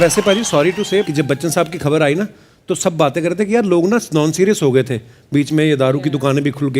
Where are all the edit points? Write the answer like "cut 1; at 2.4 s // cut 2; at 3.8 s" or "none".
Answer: cut 1; at 1.0 s

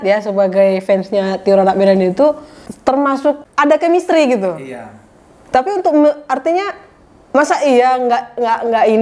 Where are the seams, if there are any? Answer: cut 1; at 3.5 s

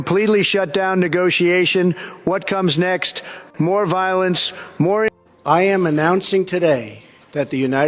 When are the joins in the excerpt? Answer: cut 1; at 5.1 s

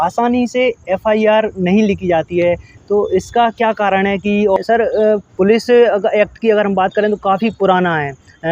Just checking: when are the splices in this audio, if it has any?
cut 1; at 4.6 s

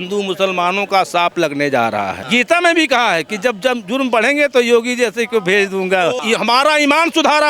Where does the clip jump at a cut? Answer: cut 1; at 2.2 s // cut 2; at 6.2 s

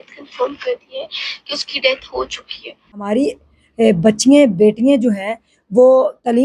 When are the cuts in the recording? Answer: cut 1; at 3.1 s

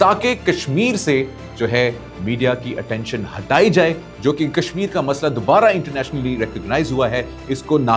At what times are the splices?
none

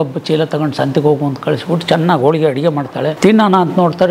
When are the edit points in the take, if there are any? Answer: cut 1; at 3.1 s

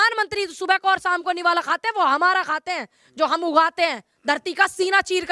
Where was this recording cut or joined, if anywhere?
none

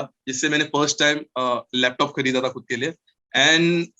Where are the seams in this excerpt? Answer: cut 1; at 3.1 s

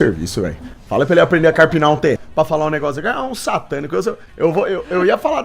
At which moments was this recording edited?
cut 1; at 2.2 s // cut 2; at 4.3 s

